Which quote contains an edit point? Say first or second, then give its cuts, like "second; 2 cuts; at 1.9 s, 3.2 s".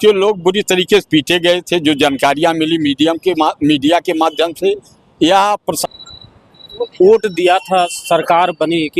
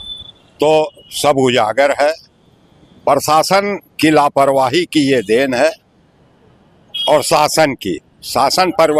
first; 1 cut; at 5.8 s